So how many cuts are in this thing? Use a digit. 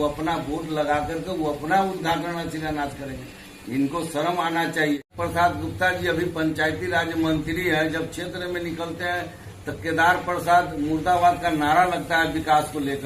1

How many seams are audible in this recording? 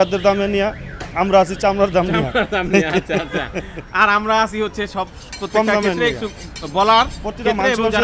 0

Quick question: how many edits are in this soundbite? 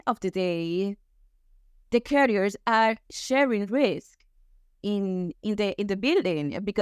0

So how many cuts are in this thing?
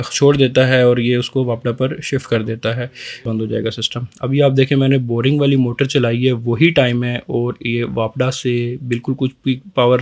1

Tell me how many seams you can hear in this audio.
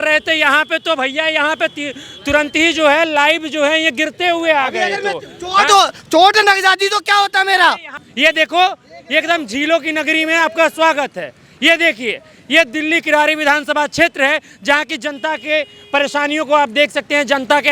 1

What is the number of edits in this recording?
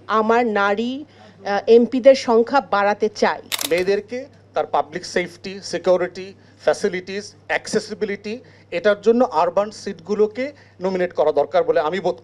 1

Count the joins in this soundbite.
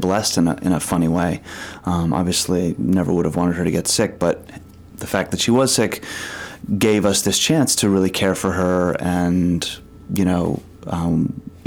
0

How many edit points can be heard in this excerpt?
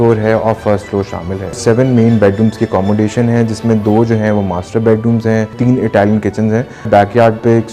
3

